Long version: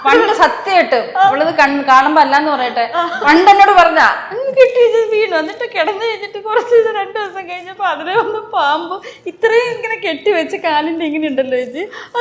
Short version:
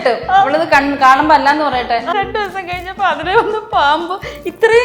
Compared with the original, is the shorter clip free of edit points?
no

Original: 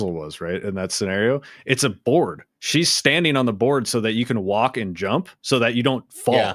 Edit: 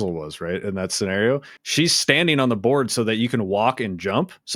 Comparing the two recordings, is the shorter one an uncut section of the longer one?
no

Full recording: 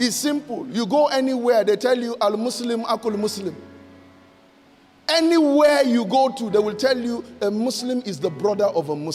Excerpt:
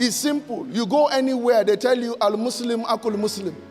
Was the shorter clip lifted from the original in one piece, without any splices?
yes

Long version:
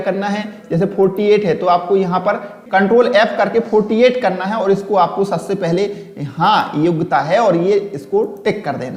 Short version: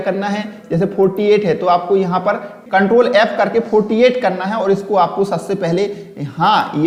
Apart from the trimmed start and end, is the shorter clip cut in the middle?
no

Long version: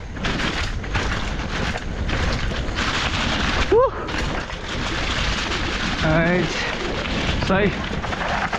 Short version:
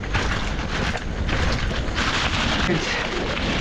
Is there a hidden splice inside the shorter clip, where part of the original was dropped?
yes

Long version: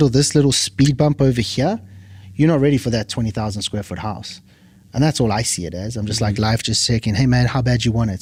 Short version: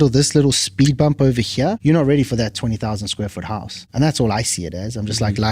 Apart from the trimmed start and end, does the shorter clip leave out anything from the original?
yes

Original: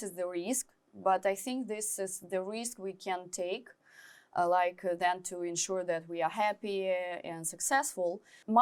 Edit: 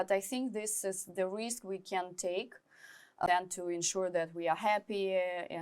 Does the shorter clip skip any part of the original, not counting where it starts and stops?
yes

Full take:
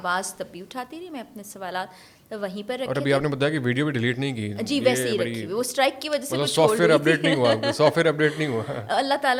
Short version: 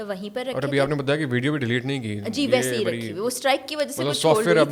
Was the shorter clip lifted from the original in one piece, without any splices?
yes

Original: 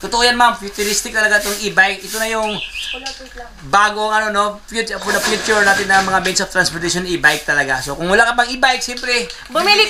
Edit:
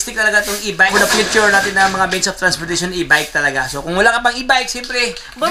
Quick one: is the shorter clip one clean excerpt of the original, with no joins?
no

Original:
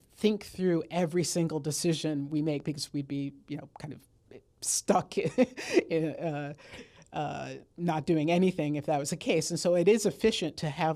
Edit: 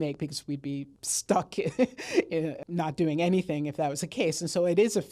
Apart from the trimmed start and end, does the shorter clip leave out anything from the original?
yes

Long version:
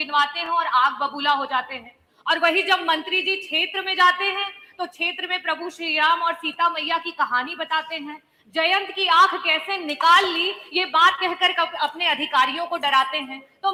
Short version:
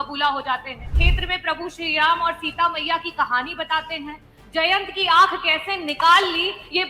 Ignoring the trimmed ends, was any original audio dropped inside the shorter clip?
yes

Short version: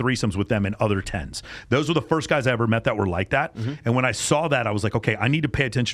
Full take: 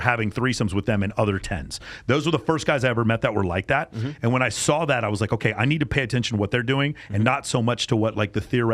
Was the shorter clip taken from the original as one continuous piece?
yes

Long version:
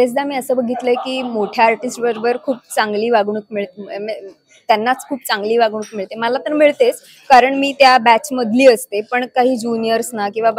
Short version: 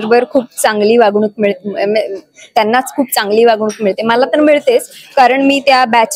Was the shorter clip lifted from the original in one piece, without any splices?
yes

